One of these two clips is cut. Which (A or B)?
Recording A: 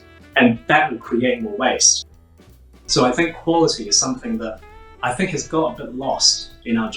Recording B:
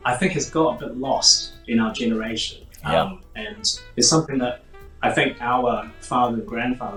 A